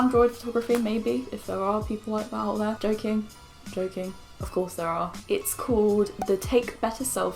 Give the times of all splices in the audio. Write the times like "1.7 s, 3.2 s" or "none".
none